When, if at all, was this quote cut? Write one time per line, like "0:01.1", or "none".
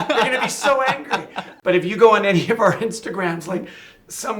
0:01.4